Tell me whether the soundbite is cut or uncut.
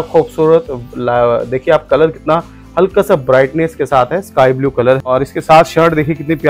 cut